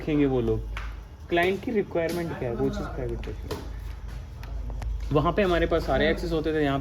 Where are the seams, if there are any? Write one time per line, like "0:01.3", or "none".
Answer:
none